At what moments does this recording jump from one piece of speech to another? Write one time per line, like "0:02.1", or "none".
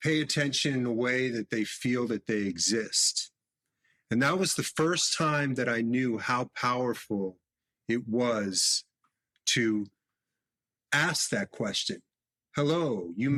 none